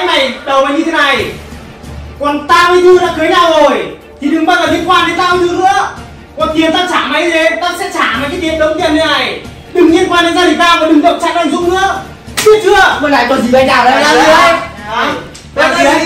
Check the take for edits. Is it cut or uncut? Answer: cut